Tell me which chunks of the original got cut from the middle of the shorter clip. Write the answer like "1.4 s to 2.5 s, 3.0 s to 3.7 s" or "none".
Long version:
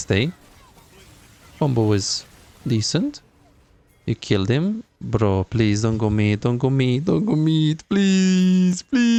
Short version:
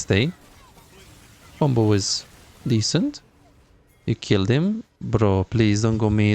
none

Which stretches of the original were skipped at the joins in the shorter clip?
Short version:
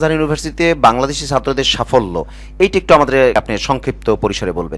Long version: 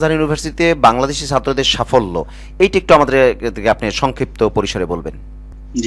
3.3 s to 3.7 s

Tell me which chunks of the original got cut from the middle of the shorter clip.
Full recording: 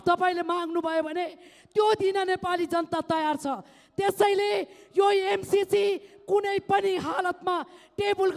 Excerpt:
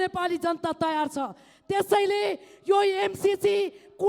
none

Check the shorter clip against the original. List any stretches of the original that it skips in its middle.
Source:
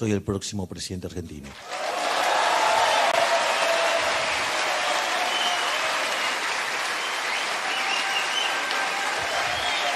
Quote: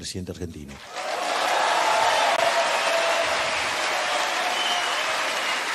none

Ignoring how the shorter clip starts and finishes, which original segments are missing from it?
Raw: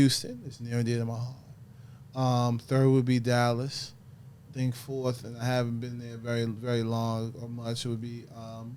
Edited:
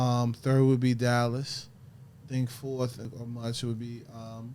5.4 s to 7.3 s

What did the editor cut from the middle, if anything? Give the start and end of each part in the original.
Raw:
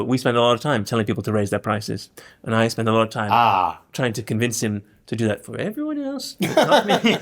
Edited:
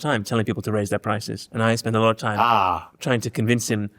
2.0 s to 2.3 s

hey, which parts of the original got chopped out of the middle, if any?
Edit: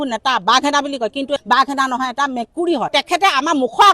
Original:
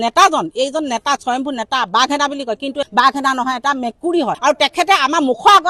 4.4 s to 4.6 s

